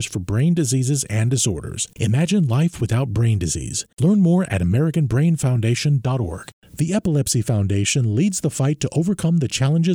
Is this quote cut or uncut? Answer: cut